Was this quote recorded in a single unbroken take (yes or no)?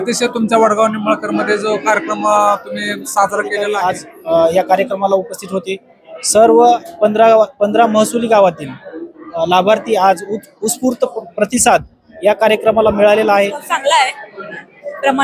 no